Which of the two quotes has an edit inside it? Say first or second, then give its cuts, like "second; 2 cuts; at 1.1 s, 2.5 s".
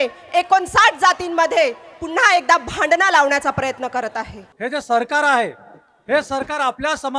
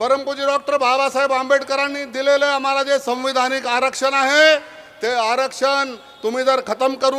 first; 1 cut; at 4.4 s